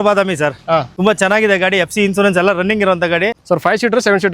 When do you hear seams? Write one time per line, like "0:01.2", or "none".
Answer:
0:00.9
0:03.4